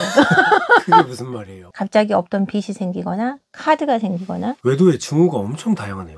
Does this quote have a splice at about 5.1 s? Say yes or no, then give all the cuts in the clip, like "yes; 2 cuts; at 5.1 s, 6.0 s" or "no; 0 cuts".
no; 1 cut; at 1.7 s